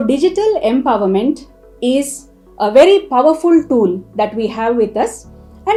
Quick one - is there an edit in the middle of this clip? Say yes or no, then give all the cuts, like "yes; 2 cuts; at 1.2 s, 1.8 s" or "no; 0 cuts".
no; 0 cuts